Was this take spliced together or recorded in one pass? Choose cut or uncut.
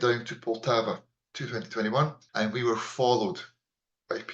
cut